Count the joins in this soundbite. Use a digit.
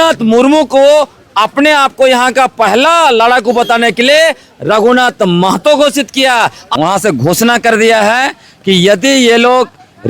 1